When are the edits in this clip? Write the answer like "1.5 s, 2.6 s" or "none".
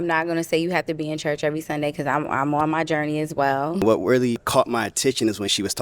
3.8 s, 4.4 s